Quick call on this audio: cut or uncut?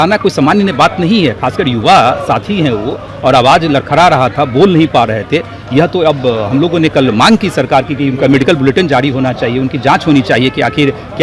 uncut